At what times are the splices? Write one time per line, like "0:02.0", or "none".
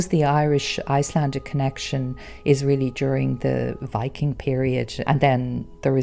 0:03.8
0:05.0